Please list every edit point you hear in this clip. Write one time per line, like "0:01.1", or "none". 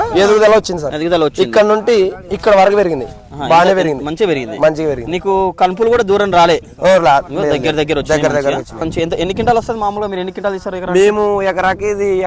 0:08.9